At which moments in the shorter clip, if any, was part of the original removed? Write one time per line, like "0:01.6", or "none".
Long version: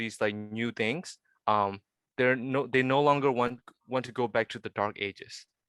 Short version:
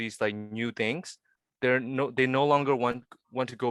0:01.3